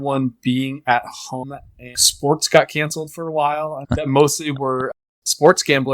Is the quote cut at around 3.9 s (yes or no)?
yes